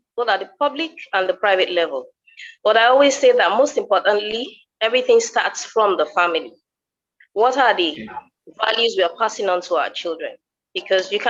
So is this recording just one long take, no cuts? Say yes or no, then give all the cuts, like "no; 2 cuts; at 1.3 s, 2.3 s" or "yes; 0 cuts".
yes; 0 cuts